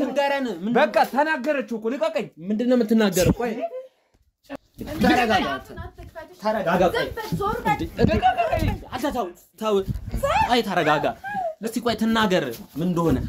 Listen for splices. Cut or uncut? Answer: cut